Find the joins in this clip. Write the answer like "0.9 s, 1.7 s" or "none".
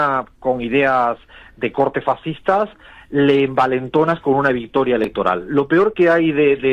none